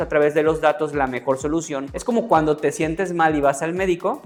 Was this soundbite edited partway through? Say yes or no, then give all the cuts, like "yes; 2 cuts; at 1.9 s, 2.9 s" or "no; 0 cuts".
no; 0 cuts